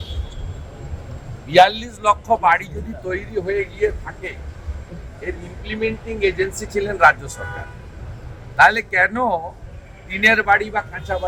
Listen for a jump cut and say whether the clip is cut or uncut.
uncut